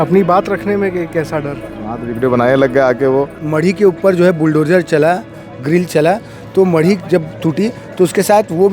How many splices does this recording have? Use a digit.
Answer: 1